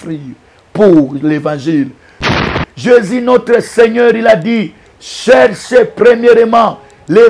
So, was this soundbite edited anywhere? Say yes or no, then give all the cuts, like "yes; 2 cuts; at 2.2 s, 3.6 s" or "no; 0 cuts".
yes; 1 cut; at 2.4 s